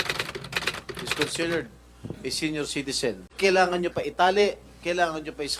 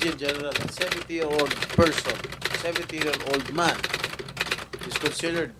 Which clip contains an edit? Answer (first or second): first